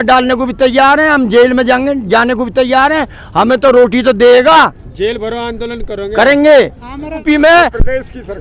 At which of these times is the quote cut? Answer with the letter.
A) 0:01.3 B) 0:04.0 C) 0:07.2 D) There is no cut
C